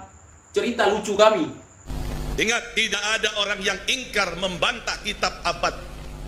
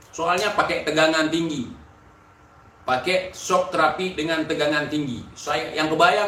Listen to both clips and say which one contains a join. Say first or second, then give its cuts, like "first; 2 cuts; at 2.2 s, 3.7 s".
first; 1 cut; at 1.9 s